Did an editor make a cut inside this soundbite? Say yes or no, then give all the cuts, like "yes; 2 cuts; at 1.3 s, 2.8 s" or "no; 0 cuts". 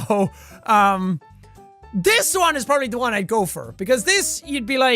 yes; 1 cut; at 3.1 s